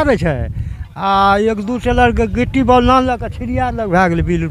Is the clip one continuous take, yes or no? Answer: yes